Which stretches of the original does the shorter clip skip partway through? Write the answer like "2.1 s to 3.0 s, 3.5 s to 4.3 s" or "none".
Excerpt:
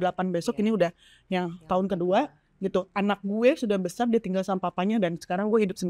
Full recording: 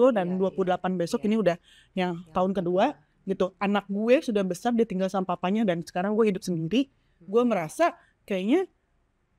none